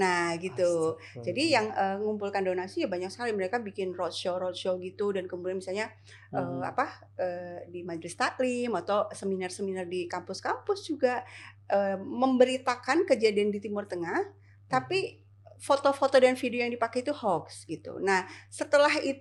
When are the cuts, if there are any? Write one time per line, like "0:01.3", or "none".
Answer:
none